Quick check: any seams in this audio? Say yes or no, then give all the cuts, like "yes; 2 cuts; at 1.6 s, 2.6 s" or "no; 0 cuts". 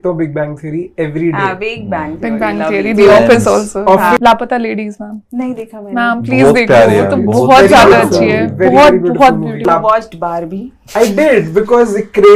yes; 2 cuts; at 4.2 s, 9.6 s